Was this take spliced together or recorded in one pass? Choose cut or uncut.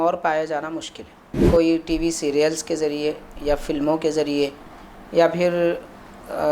cut